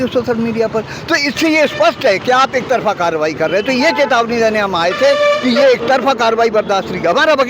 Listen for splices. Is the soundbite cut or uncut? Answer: uncut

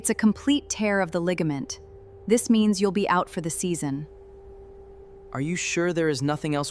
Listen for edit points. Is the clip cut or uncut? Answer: uncut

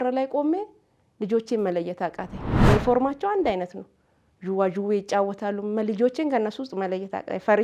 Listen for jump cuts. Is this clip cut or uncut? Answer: uncut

